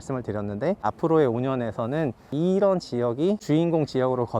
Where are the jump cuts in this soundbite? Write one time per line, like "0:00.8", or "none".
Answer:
0:00.8
0:02.3
0:03.4